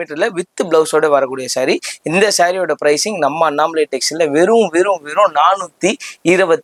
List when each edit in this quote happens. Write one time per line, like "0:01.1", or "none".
none